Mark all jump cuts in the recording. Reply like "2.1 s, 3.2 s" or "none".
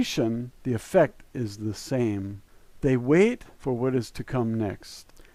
none